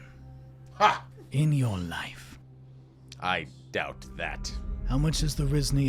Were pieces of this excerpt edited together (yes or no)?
yes